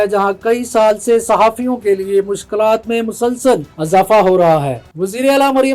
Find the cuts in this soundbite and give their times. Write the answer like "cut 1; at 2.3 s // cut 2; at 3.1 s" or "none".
cut 1; at 4.8 s